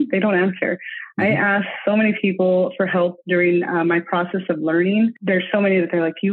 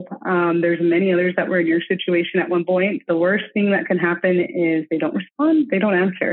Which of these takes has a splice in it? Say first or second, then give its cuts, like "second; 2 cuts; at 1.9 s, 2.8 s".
second; 1 cut; at 3.0 s